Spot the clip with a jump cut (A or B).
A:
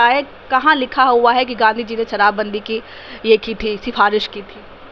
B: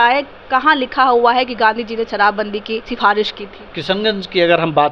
B